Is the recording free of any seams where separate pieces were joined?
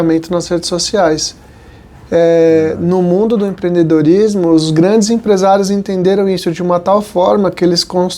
yes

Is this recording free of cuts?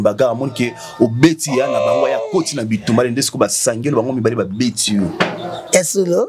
yes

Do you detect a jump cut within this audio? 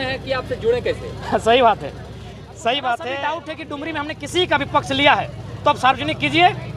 yes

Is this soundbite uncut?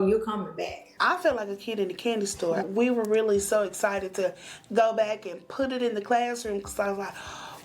no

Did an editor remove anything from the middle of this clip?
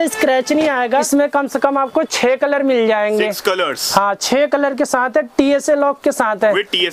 yes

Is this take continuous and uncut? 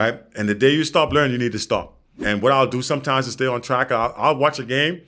no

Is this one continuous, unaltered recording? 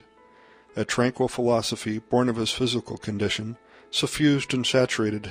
yes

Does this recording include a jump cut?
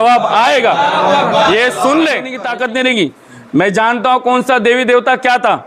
yes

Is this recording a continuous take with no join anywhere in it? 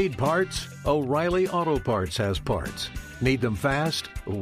yes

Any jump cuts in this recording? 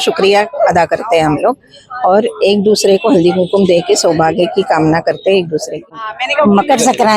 yes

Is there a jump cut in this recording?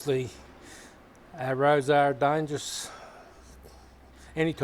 no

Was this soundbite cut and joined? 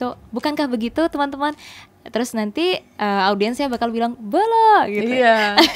no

